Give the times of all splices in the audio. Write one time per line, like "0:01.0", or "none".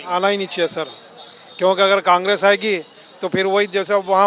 none